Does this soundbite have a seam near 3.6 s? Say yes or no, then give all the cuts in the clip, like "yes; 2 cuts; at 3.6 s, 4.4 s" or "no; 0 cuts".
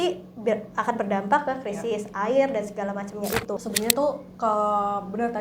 yes; 1 cut; at 3.6 s